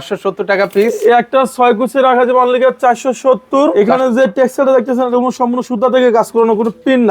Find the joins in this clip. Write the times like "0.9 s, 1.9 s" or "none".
3.7 s